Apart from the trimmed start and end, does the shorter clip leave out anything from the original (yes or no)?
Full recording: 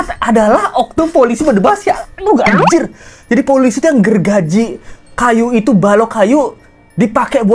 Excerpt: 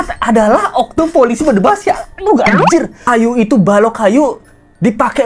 yes